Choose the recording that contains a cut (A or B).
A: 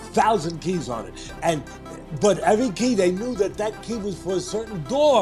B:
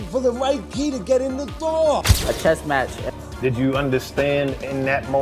B